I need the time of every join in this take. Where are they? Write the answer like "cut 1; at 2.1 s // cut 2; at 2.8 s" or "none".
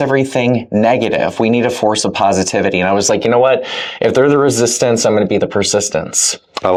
none